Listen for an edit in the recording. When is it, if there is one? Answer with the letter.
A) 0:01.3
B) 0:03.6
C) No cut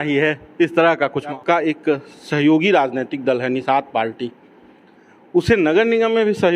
A